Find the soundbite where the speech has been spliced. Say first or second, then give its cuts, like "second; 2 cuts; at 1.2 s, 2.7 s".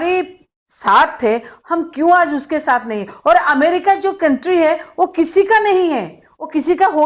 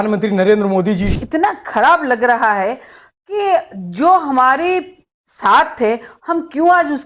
second; 1 cut; at 1.1 s